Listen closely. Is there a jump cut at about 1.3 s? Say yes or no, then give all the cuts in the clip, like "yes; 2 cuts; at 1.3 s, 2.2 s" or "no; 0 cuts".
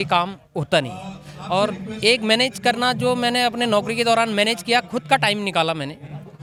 no; 0 cuts